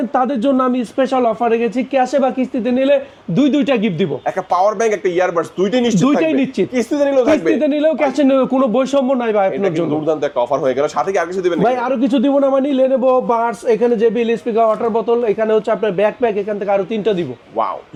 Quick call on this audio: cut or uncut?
uncut